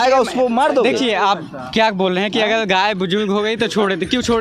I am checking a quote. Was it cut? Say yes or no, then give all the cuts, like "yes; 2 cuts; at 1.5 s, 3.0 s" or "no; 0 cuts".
no; 0 cuts